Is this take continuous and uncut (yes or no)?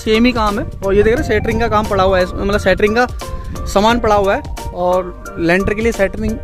yes